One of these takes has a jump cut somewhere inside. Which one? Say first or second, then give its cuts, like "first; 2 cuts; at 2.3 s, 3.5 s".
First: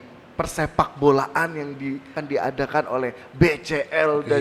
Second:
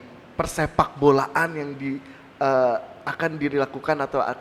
first; 1 cut; at 2.1 s